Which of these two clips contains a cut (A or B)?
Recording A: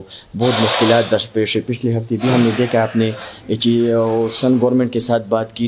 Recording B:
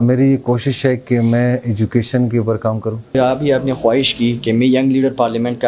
B